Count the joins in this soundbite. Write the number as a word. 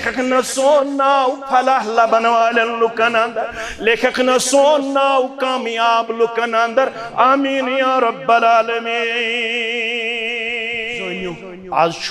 one